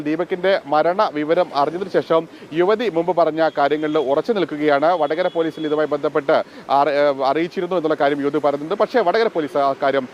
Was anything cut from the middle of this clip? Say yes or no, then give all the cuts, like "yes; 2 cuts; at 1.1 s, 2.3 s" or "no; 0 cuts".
no; 0 cuts